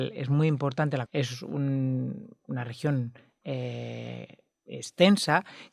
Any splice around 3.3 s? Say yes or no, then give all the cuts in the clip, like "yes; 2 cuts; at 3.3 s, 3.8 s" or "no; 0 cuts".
no; 1 cut; at 1.0 s